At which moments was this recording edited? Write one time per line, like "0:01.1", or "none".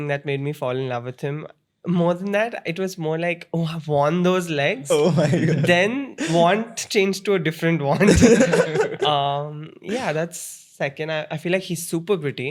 none